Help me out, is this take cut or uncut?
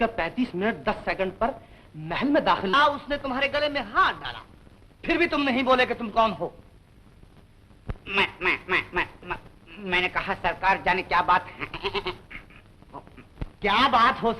cut